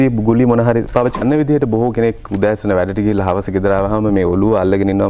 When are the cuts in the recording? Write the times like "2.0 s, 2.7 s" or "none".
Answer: 1.2 s